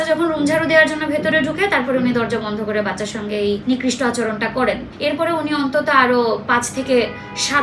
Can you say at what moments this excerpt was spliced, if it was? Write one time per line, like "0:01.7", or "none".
0:03.6
0:04.9